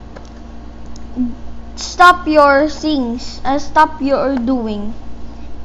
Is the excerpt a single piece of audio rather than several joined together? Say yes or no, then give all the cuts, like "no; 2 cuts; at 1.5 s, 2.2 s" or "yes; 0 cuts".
yes; 0 cuts